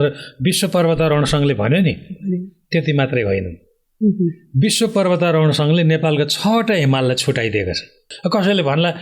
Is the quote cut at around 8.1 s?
yes; 1 cut; at 8.1 s

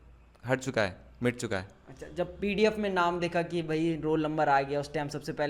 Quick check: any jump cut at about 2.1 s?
no; 0 cuts

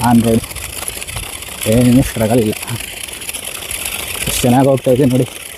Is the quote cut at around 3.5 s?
no; 0 cuts

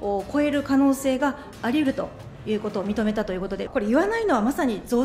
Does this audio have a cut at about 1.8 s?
no; 1 cut; at 3.6 s

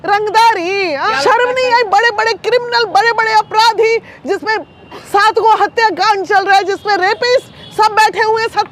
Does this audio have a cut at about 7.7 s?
no; 1 cut; at 1.1 s

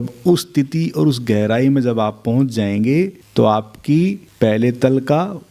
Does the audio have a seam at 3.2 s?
yes; 2 cuts; at 3.2 s, 4.2 s

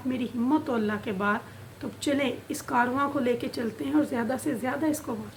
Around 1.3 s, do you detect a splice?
no; 0 cuts

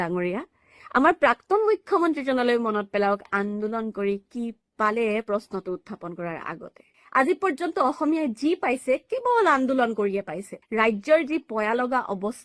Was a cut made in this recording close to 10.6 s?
yes; 2 cuts; at 6.9 s, 10.6 s

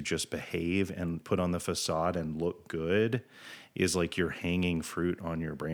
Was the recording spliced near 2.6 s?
no; 1 cut; at 1.2 s

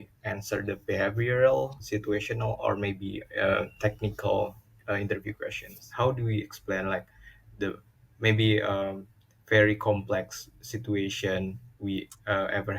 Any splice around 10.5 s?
no; 1 cut; at 5.9 s

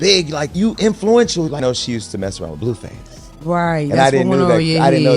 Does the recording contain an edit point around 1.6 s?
yes; 1 cut; at 1.6 s

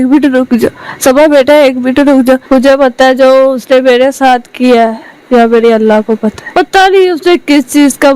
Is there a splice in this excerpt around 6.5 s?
yes; 2 cuts; at 2.4 s, 6.5 s

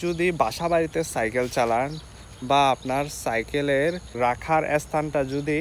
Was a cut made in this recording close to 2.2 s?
no; 1 cut; at 4.1 s

